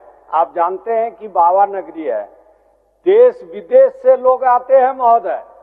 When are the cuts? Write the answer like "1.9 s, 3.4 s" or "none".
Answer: none